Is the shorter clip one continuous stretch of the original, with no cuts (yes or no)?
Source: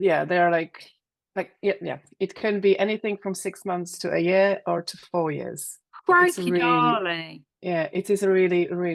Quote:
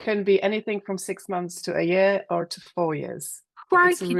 yes